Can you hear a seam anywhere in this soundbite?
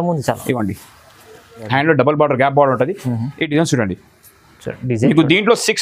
yes; 1 cut; at 1.7 s

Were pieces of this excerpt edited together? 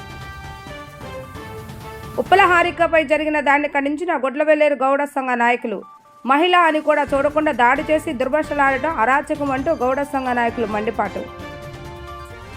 yes; 1 cut; at 1.8 s

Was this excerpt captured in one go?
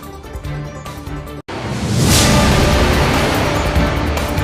yes; 0 cuts

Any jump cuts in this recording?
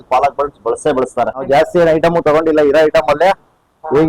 yes; 1 cut; at 1.4 s

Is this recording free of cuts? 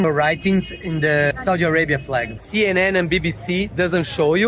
no; 2 cuts; at 1.3 s, 2.4 s

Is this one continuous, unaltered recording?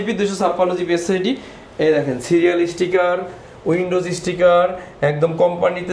yes; 0 cuts

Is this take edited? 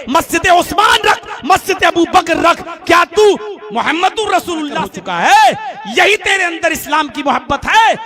yes; 1 cut; at 4.8 s

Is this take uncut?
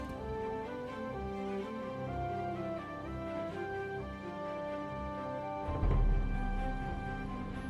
yes; 0 cuts

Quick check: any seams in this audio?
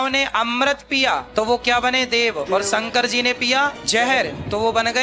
yes; 2 cuts; at 1.3 s, 3.8 s

